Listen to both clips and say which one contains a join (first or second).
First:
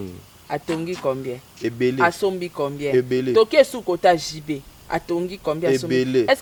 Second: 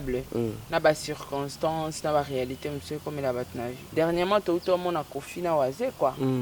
second